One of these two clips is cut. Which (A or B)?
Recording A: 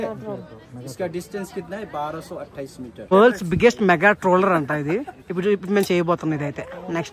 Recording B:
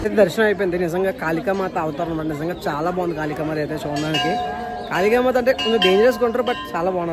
A